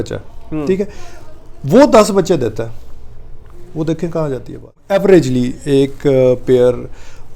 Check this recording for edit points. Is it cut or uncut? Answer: cut